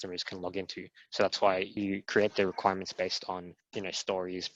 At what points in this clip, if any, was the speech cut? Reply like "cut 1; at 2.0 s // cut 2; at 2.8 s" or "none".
cut 1; at 1.7 s // cut 2; at 3.6 s